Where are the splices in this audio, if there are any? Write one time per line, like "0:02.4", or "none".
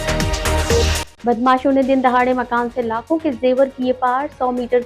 0:01.0